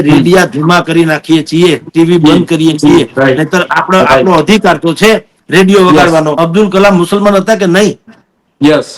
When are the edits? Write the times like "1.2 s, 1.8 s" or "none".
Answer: 6.3 s